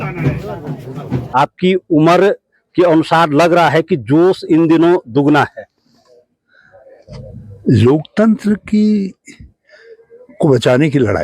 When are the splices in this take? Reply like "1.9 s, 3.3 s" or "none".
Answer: 1.2 s